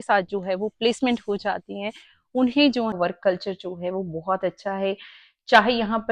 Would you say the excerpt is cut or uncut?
cut